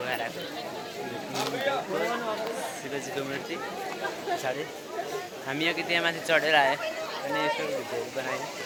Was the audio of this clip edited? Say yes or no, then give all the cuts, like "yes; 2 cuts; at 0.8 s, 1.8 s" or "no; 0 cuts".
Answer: no; 0 cuts